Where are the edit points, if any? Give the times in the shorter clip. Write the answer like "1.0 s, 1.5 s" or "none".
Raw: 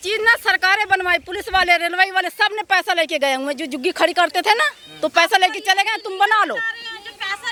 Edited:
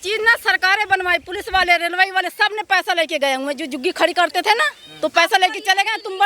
none